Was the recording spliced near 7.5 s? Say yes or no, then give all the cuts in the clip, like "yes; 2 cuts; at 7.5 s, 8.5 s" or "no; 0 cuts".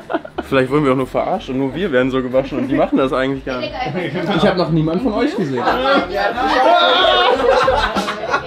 no; 1 cut; at 5.6 s